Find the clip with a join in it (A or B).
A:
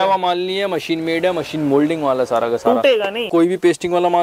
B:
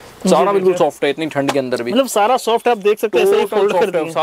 A